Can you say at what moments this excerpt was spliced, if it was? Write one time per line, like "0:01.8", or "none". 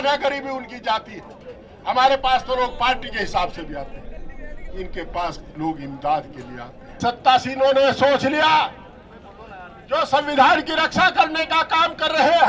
0:07.0